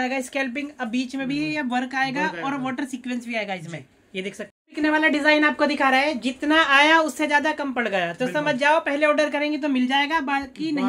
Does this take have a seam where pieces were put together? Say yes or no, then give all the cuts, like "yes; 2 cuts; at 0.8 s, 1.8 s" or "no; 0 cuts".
yes; 1 cut; at 4.5 s